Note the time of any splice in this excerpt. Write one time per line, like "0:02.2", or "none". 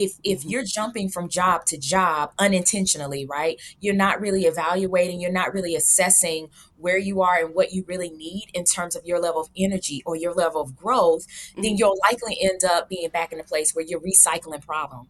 none